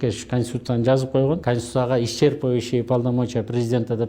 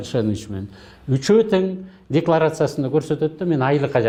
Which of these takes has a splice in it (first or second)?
first